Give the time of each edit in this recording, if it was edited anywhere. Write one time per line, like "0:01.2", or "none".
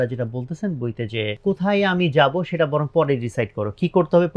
0:01.4

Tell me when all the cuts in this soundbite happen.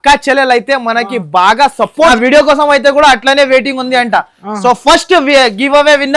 0:02.1

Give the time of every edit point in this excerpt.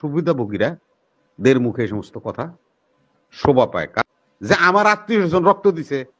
0:04.0

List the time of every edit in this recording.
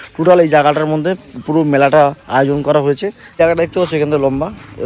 0:03.3

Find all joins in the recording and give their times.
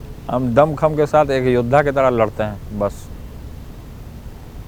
none

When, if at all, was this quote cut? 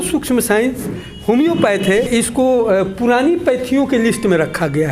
0:02.1

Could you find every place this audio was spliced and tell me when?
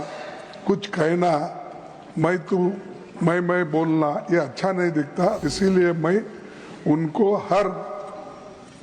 0:05.5

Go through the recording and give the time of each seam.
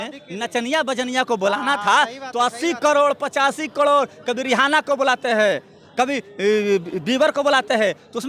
none

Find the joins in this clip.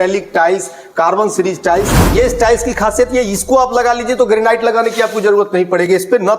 0:02.0

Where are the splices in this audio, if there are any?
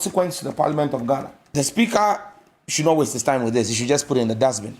0:01.5

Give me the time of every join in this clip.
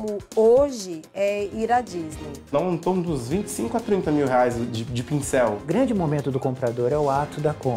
0:02.5
0:05.6

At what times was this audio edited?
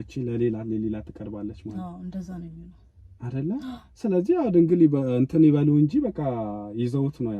none

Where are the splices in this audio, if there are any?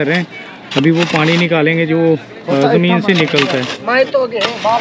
none

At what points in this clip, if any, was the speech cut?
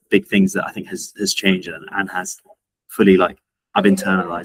none

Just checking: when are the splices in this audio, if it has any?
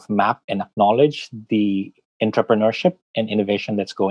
none

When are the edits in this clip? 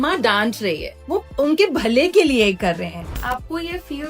0:00.9
0:03.0

